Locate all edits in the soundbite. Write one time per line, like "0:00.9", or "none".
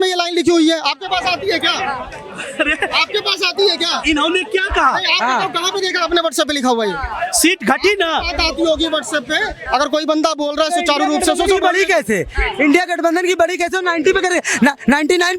none